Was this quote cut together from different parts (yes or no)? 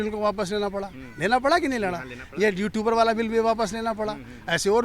no